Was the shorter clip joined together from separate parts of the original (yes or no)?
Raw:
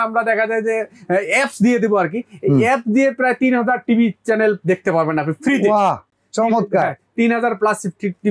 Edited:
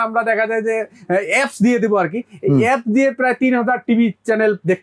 no